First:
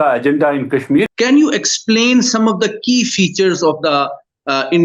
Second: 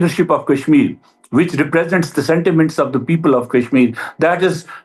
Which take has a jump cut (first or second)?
first